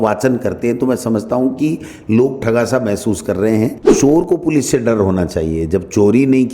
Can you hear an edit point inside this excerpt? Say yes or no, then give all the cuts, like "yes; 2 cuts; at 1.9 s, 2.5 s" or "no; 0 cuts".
yes; 1 cut; at 3.8 s